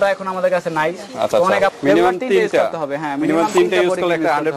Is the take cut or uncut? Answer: cut